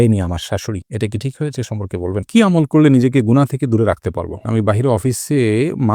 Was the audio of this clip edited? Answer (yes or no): yes